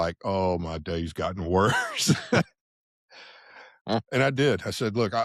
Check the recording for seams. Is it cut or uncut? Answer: uncut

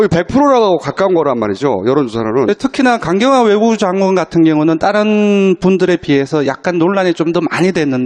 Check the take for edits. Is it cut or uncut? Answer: uncut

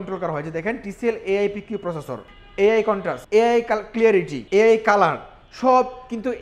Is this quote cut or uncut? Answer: cut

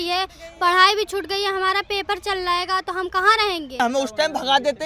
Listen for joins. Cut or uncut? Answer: cut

